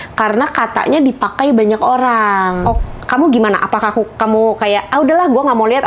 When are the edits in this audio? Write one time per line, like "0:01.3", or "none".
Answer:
0:02.8